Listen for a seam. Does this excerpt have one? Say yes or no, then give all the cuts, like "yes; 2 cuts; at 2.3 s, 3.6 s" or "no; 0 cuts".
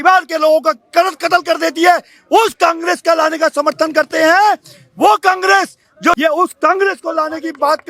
yes; 1 cut; at 6.2 s